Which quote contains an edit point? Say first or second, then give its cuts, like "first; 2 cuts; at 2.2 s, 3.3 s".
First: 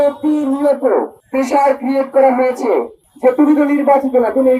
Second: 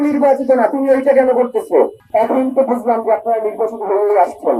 first; 1 cut; at 1.2 s